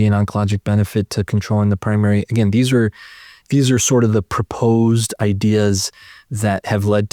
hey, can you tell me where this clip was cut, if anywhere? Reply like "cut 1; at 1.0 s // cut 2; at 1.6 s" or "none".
none